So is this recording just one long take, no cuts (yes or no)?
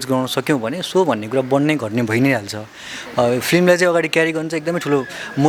yes